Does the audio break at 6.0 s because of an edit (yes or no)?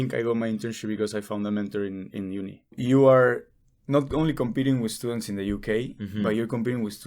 no